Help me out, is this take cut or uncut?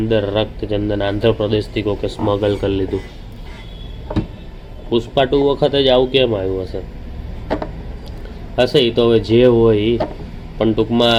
uncut